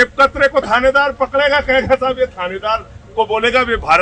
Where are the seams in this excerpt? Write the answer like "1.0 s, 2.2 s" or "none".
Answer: none